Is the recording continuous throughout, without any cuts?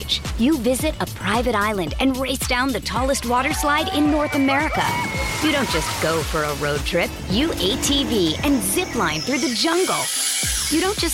yes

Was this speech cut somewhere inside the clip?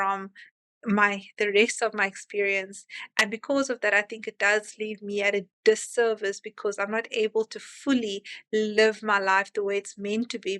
no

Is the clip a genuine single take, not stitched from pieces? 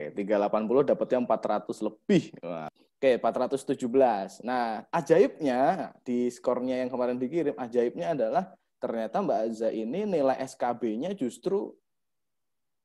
no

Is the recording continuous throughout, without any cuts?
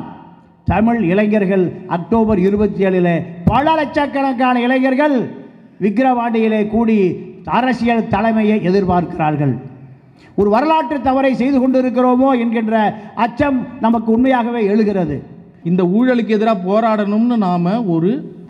no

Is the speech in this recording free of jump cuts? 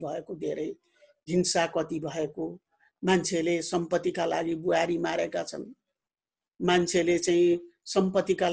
yes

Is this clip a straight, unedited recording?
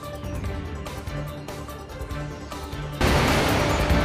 no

